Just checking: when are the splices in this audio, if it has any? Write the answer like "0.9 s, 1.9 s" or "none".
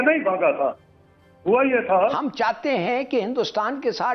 2.2 s